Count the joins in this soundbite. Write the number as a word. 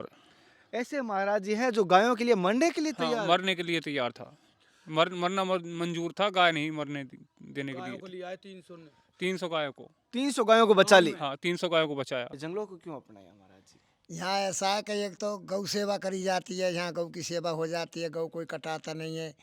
one